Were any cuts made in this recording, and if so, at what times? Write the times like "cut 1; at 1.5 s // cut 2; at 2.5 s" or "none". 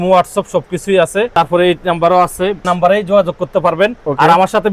cut 1; at 1.3 s // cut 2; at 2.7 s